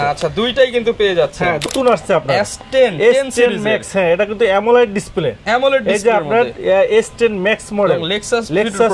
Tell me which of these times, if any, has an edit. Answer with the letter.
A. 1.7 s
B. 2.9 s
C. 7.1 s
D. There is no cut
A